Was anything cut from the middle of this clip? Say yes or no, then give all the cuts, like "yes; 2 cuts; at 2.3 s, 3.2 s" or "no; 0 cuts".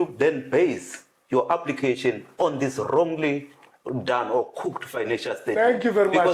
no; 0 cuts